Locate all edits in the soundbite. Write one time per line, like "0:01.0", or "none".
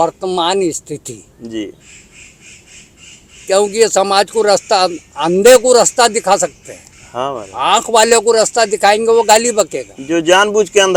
none